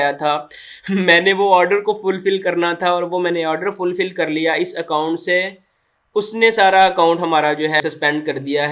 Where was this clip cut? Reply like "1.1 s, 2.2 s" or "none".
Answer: 7.8 s